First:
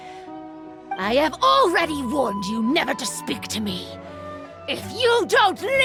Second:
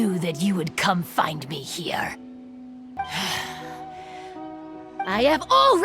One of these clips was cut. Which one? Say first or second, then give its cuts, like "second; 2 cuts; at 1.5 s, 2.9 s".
second; 1 cut; at 2.8 s